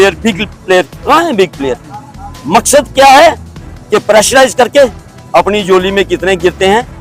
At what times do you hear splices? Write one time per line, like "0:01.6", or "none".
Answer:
none